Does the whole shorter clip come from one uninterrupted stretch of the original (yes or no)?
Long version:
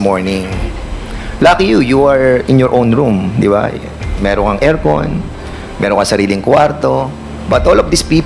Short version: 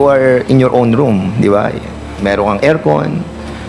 yes